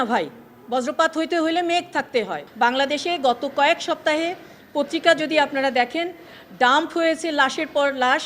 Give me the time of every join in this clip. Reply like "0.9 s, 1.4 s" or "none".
2.4 s